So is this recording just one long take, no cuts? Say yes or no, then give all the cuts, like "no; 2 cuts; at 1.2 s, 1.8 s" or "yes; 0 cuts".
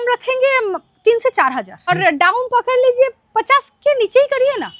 no; 1 cut; at 1.9 s